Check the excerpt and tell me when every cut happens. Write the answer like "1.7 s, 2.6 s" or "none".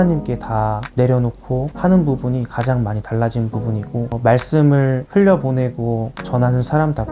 1.7 s, 4.1 s